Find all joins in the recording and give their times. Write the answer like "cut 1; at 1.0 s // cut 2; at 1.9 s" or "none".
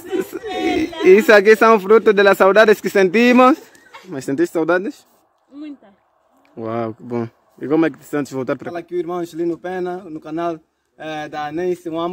cut 1; at 4.1 s // cut 2; at 8.7 s